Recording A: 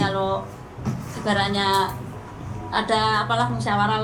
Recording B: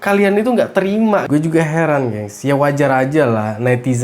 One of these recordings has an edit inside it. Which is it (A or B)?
B